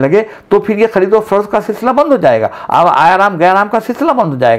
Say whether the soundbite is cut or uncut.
uncut